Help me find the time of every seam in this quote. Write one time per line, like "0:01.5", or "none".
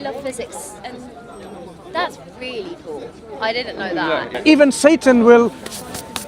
0:04.3